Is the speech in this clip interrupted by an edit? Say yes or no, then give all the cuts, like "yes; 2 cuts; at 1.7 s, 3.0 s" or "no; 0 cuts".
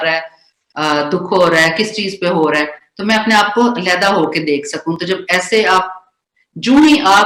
no; 0 cuts